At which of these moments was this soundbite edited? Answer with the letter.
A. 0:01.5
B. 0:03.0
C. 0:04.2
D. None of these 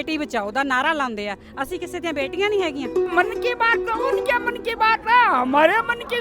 B